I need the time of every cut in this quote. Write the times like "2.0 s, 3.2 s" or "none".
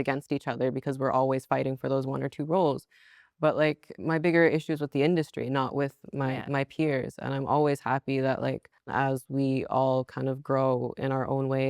3.9 s, 8.9 s